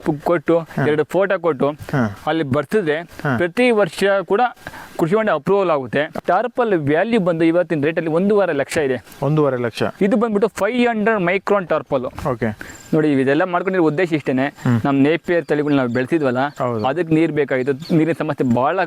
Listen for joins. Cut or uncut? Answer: cut